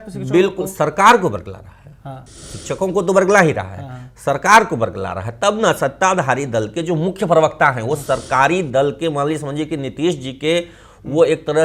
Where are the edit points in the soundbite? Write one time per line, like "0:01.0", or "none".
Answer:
none